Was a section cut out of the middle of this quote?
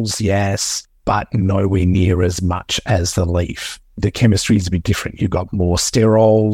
yes; 1 cut; at 4.0 s

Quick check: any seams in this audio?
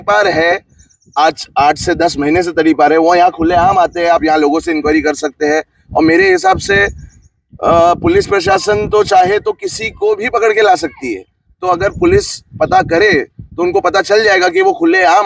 no; 0 cuts

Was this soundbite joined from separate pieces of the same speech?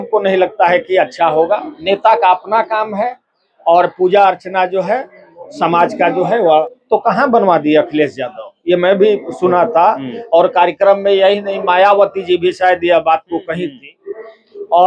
yes; 1 cut; at 6.7 s

